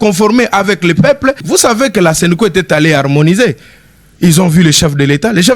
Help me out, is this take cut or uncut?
cut